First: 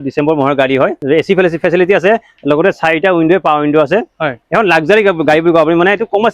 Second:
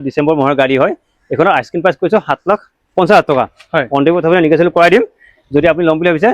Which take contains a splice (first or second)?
first